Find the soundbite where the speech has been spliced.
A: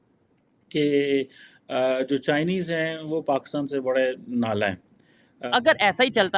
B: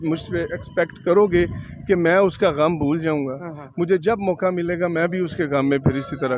A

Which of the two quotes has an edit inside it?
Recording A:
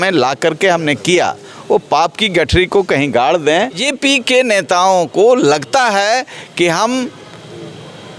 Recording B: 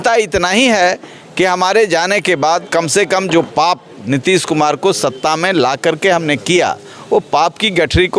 A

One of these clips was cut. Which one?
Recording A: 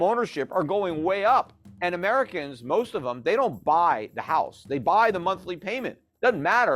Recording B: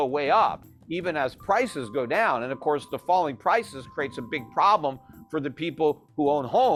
A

